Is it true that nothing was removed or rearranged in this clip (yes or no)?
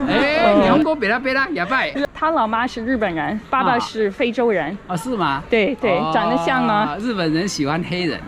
no